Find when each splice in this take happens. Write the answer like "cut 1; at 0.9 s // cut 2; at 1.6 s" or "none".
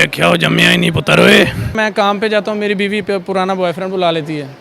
cut 1; at 1.8 s